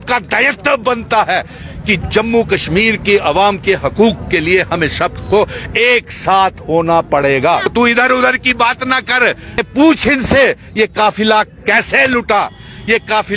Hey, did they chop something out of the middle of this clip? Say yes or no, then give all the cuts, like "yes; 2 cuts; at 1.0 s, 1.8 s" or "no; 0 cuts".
yes; 2 cuts; at 7.7 s, 9.6 s